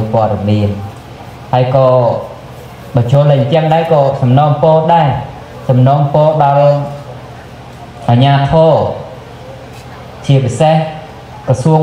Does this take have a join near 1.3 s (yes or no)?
no